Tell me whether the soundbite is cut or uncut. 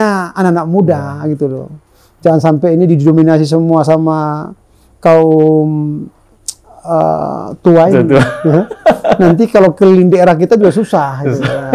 uncut